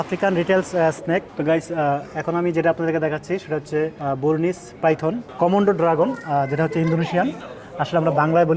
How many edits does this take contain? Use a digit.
3